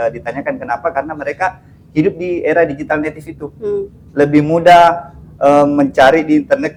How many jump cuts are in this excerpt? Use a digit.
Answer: 0